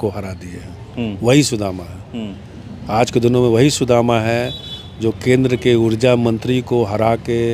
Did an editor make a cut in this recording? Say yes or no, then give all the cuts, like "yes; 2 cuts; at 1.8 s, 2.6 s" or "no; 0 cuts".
no; 0 cuts